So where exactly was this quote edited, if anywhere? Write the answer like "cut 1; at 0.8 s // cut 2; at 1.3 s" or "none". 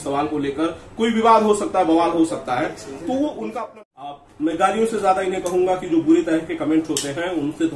cut 1; at 3.5 s

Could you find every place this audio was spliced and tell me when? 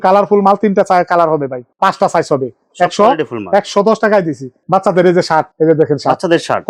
none

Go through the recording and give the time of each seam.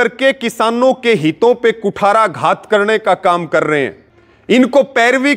none

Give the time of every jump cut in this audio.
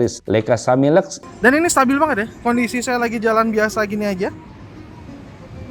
cut 1; at 1.2 s

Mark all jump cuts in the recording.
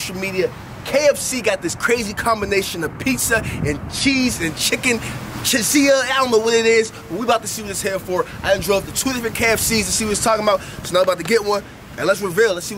none

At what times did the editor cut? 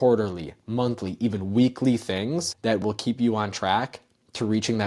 cut 1; at 2.5 s

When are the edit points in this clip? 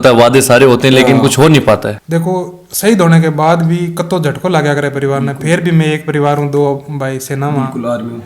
cut 1; at 2.0 s

